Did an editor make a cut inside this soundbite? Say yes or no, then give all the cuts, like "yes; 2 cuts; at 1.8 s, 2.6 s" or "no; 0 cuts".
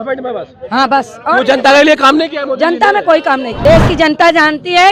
yes; 1 cut; at 3.5 s